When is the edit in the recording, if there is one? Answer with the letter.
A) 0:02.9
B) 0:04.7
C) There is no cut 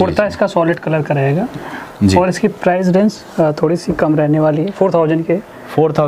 C